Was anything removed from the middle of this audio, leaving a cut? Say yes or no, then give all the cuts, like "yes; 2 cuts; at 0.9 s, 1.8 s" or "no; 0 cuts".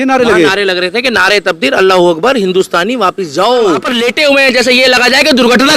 yes; 1 cut; at 4.1 s